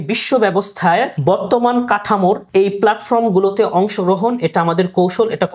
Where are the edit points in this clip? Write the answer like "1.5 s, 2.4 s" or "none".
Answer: 1.1 s, 2.4 s